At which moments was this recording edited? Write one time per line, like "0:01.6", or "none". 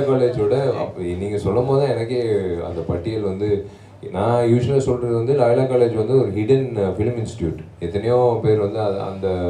none